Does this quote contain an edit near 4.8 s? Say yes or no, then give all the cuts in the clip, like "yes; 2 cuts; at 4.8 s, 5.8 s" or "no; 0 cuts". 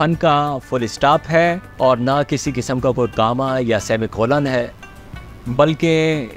no; 0 cuts